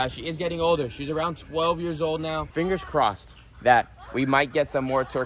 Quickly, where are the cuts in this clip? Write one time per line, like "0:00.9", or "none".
0:02.5